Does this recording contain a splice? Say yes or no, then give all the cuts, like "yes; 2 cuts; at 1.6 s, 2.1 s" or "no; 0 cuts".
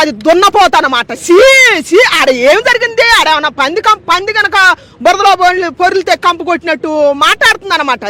no; 0 cuts